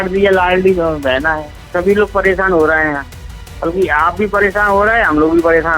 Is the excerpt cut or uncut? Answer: cut